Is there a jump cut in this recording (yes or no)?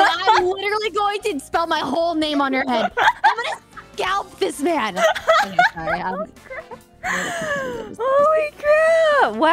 no